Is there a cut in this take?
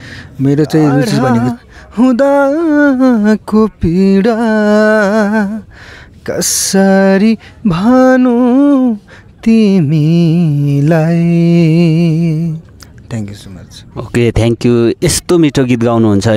yes; 1 cut; at 1.4 s

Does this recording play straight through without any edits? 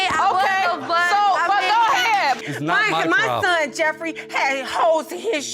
no; 1 cut; at 2.5 s

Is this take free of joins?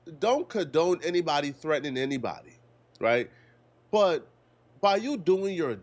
yes; 0 cuts

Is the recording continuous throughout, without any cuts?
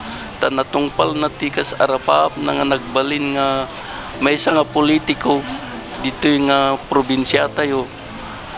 yes; 0 cuts

